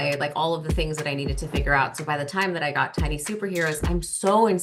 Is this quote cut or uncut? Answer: uncut